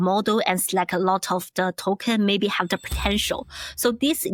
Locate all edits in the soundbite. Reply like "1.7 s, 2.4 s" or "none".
none